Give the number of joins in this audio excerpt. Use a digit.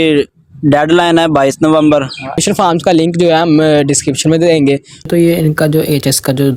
2